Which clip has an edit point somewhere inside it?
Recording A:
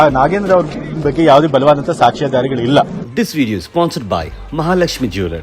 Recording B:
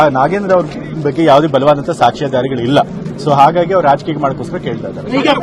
A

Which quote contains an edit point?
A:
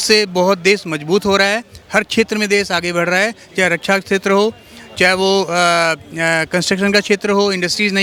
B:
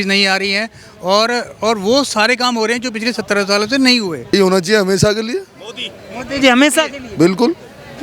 B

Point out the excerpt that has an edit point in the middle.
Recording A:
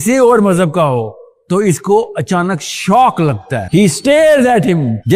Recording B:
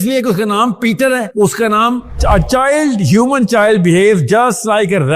B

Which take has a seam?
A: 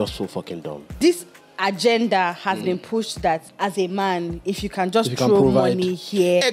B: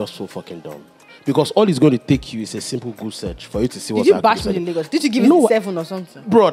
A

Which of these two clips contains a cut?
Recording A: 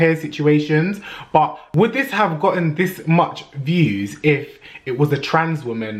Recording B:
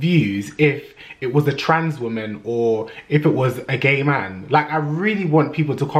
A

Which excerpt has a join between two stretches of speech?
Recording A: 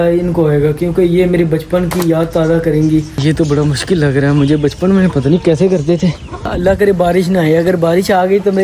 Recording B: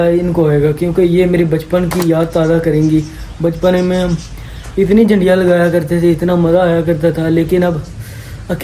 A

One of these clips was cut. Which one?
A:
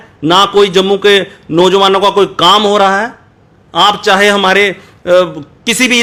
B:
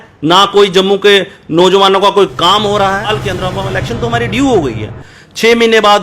B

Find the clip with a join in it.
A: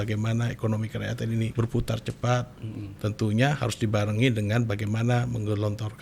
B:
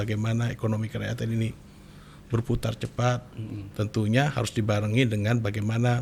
A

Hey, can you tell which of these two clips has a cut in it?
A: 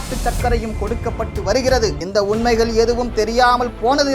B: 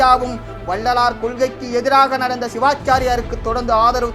A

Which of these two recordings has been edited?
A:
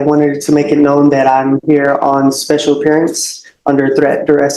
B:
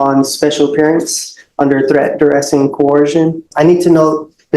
B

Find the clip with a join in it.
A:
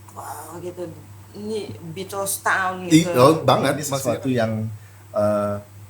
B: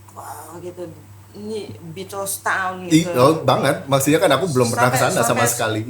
A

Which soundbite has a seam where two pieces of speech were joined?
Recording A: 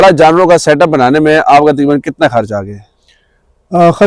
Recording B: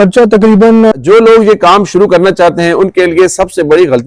B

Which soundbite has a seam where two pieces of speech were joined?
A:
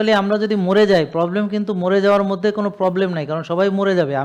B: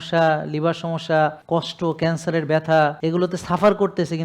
B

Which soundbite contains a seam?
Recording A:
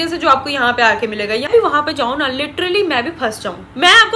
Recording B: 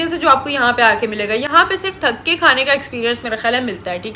A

